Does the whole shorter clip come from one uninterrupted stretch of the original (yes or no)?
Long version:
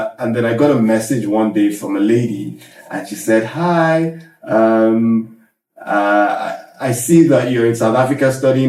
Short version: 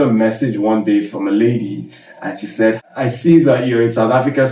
no